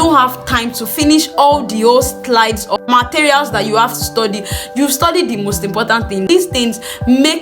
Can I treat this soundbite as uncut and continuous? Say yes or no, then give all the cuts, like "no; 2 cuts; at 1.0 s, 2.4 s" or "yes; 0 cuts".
no; 2 cuts; at 2.8 s, 6.3 s